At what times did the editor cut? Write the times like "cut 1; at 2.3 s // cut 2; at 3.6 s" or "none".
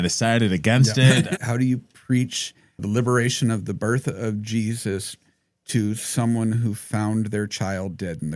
cut 1; at 1.3 s // cut 2; at 2.8 s